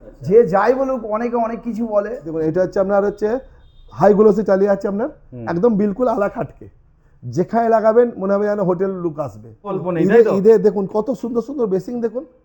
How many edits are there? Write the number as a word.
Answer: two